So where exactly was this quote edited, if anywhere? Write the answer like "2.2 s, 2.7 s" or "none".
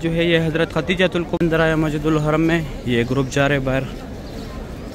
1.3 s